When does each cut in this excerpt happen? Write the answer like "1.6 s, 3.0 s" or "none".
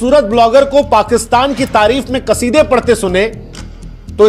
none